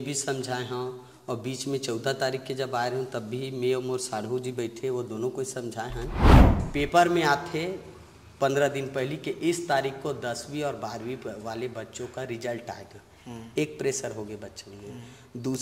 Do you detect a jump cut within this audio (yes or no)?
yes